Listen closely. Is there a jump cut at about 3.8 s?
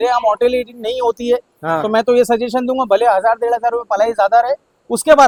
no; 0 cuts

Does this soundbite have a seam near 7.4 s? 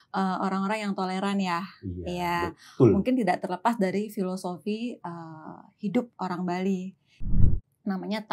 yes; 1 cut; at 7.4 s

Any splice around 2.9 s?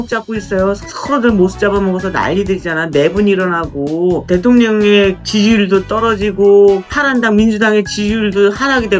no; 4 cuts; at 0.9 s, 4.2 s, 5.2 s, 6.9 s

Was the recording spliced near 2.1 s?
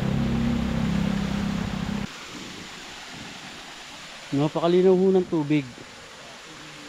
yes; 1 cut; at 2.1 s

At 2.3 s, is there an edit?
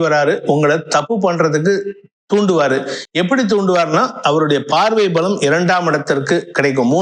no; 0 cuts

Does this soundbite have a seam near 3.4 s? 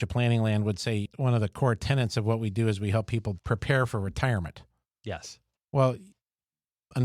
yes; 2 cuts; at 1.0 s, 3.4 s

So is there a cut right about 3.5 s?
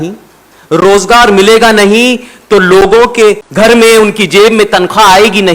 yes; 1 cut; at 3.5 s

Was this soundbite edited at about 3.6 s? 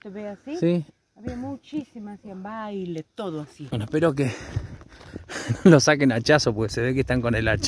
yes; 1 cut; at 3.6 s

